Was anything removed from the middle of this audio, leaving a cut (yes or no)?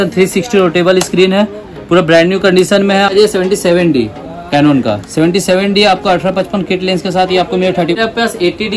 yes